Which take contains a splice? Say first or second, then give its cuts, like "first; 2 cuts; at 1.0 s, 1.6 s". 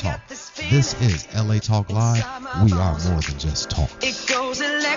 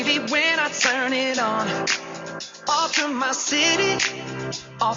first; 1 cut; at 3.9 s